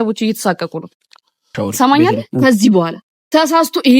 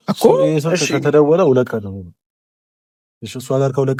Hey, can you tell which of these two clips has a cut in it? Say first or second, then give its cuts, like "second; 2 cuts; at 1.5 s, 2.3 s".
first; 1 cut; at 1.5 s